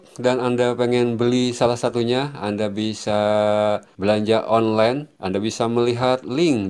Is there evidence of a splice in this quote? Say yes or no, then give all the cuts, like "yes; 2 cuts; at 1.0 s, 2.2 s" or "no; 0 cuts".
yes; 2 cuts; at 3.9 s, 5.1 s